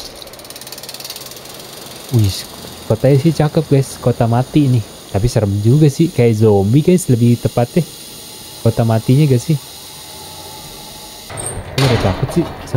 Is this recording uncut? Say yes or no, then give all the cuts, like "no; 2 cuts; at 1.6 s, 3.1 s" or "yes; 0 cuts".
no; 1 cut; at 11.4 s